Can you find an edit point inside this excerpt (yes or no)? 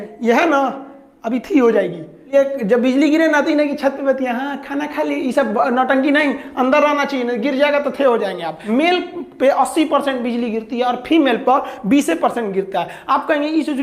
yes